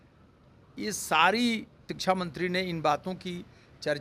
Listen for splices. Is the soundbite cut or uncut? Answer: cut